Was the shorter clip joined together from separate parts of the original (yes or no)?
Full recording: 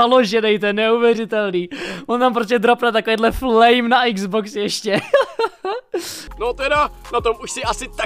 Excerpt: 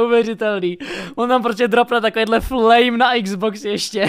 no